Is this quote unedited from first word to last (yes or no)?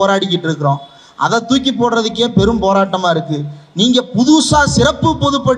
yes